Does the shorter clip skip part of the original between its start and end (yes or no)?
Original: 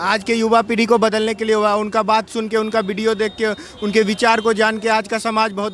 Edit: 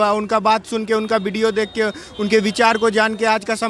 no